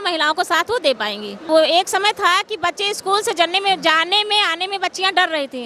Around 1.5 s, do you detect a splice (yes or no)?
yes